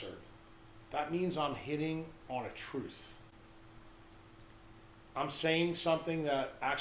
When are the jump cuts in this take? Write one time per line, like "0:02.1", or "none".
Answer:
none